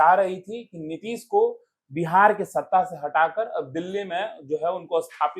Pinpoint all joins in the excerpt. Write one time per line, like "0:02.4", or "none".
none